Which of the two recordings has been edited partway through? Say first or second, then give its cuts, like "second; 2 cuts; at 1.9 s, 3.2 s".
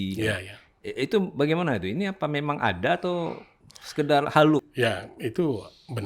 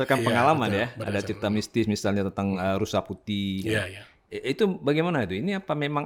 first; 1 cut; at 4.7 s